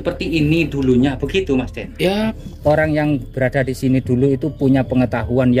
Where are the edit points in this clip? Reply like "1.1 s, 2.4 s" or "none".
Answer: 2.4 s